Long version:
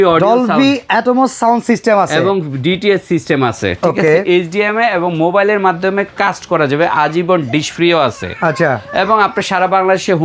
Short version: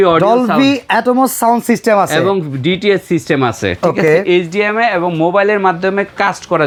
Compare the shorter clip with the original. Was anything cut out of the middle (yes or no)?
no